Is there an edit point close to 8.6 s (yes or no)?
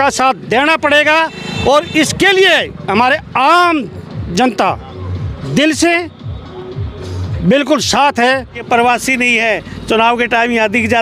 yes